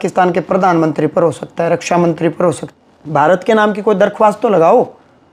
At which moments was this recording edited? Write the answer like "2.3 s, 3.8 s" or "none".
2.7 s